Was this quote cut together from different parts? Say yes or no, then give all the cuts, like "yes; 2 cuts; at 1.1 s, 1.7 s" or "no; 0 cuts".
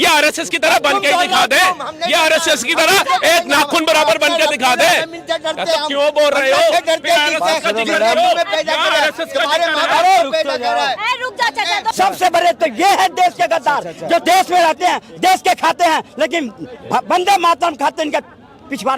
yes; 1 cut; at 11.9 s